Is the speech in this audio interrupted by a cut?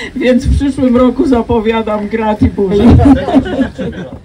yes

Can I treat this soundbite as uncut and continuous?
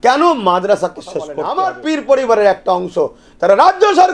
no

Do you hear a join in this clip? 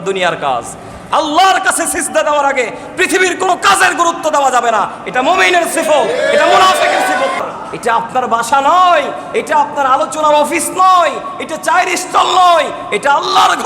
yes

